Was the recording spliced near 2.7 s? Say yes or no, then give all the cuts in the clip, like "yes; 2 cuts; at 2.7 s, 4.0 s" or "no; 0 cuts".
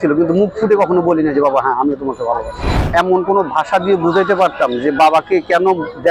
yes; 1 cut; at 2.7 s